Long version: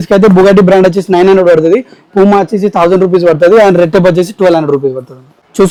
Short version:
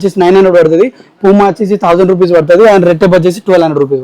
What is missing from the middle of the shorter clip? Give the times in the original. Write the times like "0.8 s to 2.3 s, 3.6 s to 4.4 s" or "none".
none